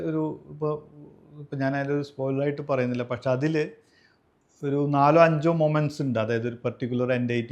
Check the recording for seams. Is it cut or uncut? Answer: uncut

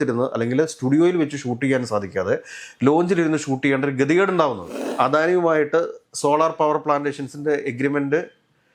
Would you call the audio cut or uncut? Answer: cut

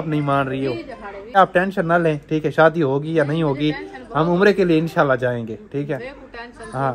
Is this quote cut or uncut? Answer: cut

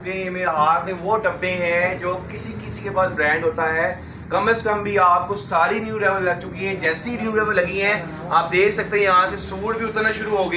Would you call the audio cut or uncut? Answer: uncut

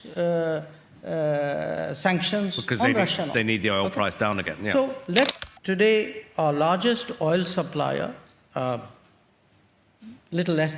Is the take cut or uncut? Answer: cut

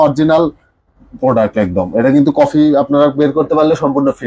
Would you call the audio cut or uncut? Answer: uncut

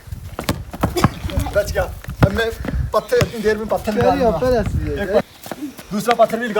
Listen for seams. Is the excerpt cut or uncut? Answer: uncut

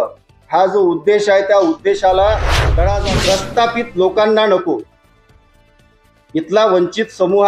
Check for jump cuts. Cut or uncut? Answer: cut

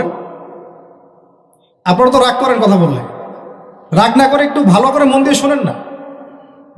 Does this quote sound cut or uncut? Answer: uncut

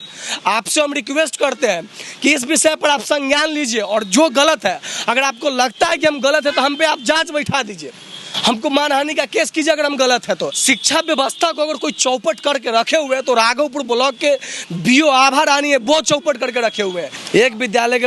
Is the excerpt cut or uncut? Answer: cut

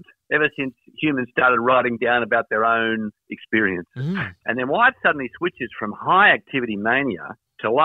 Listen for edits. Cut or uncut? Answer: cut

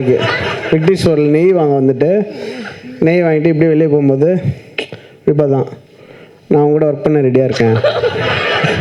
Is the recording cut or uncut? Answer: uncut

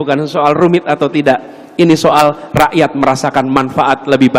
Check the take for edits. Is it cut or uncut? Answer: uncut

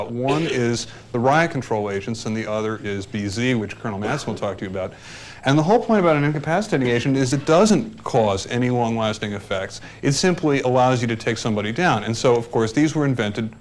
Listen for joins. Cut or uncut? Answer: cut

